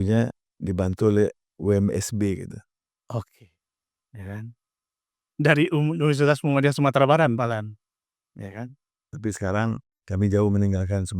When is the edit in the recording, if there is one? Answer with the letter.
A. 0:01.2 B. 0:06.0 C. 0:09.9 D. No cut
C